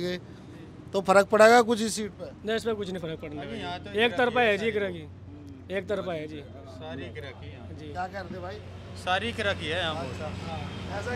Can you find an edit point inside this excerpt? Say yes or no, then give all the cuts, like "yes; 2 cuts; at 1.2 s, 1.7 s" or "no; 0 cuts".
no; 0 cuts